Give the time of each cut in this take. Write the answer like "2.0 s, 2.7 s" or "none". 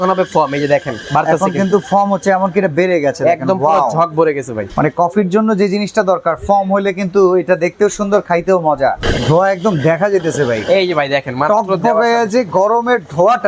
4.6 s, 9.0 s